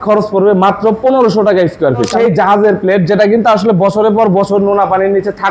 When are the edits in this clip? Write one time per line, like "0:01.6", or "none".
0:02.1